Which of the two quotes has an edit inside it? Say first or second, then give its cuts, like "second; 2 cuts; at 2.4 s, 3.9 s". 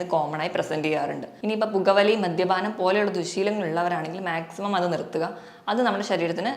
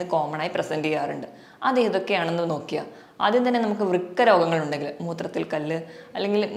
first; 1 cut; at 1.3 s